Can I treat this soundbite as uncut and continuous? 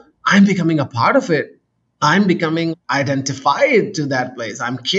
yes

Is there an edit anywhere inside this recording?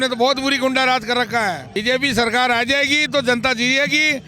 yes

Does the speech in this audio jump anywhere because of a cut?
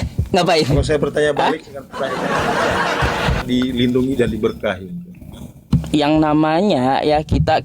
yes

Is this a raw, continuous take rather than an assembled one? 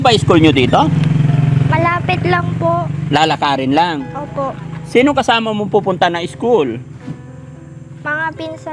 yes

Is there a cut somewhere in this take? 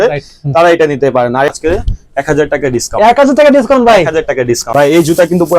yes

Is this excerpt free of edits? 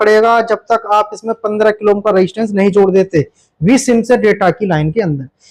yes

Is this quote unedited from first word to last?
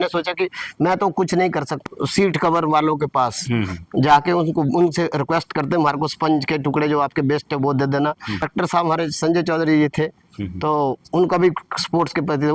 no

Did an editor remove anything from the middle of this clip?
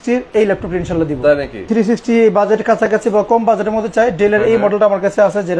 yes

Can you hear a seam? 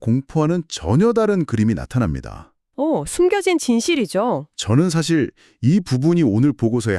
no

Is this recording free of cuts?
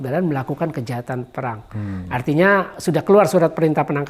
yes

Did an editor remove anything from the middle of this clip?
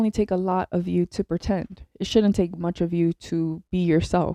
no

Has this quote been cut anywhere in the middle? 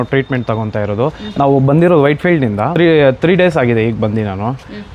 yes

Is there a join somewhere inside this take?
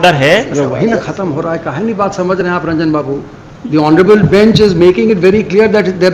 no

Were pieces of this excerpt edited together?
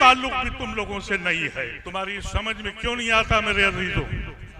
yes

